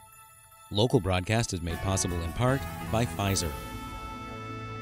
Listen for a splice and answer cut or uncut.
cut